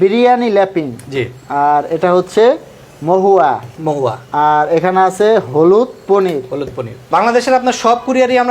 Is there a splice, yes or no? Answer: yes